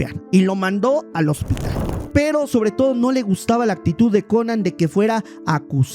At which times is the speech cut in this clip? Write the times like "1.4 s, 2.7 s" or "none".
1.9 s